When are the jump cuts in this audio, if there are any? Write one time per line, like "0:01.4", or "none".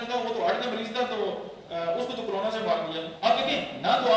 0:03.1